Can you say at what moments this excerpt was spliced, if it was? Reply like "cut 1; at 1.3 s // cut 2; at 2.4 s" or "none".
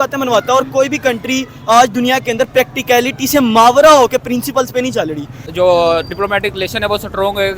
cut 1; at 5.5 s